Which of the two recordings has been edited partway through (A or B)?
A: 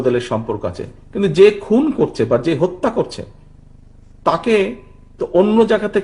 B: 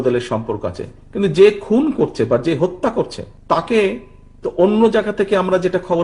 B